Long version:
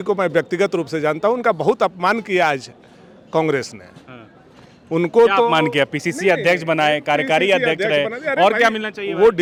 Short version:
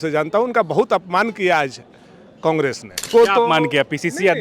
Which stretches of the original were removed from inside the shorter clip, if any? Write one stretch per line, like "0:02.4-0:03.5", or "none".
0:04.0-0:05.1